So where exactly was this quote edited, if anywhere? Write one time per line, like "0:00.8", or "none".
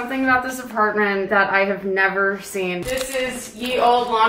0:01.3